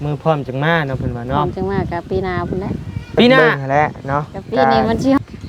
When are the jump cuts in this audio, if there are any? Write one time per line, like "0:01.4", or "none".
0:03.4